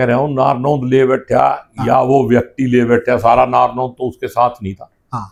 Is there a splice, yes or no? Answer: no